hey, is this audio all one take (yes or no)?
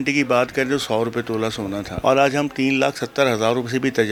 yes